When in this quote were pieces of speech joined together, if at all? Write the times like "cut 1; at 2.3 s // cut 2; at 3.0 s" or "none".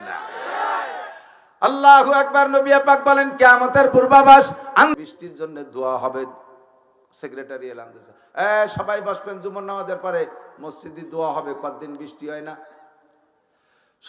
cut 1; at 4.9 s